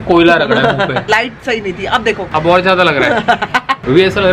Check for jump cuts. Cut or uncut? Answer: cut